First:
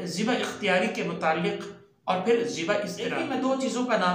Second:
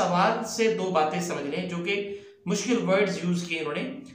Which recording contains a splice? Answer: first; 1 cut; at 3.2 s

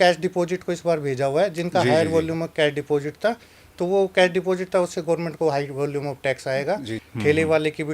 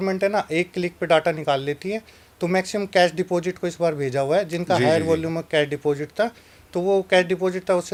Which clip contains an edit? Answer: first; 1 cut; at 7.0 s

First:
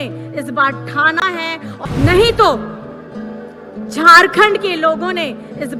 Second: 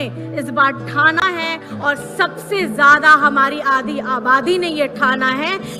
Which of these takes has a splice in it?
first; 1 cut; at 1.8 s

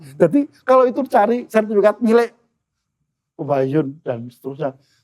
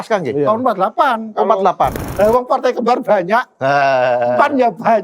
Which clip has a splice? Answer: second; 1 cut; at 2.0 s

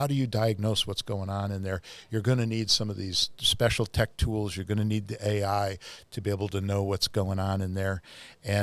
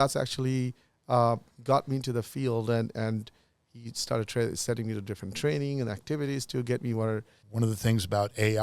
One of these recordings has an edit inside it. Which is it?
second; 1 cut; at 7.4 s

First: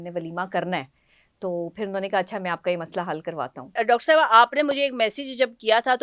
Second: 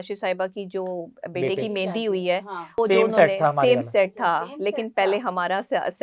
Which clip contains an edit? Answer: second; 1 cut; at 2.8 s

